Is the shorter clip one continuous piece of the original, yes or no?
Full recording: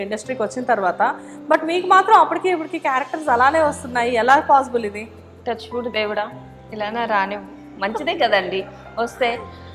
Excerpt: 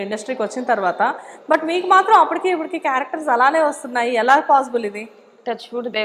yes